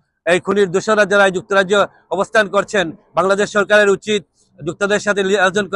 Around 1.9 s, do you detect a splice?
no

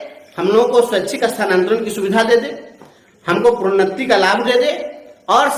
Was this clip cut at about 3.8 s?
no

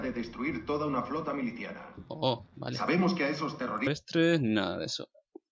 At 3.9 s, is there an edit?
no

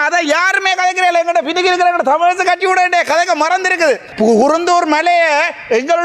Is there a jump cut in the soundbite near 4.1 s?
yes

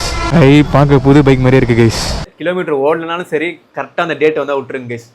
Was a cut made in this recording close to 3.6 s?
no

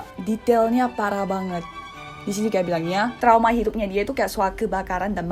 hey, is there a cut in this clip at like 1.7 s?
no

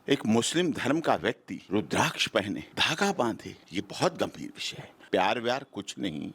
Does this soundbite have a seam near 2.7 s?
yes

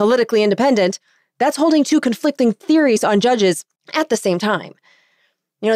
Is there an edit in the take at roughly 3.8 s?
yes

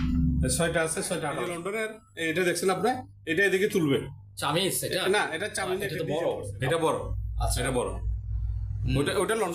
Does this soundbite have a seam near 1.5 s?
yes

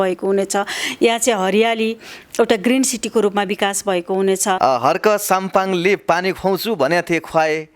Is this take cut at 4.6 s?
yes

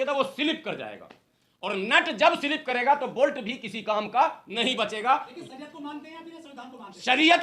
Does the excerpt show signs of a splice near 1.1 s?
no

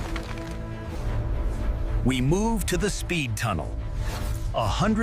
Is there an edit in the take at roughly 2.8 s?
no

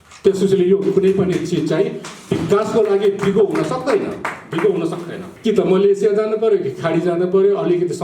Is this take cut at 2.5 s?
no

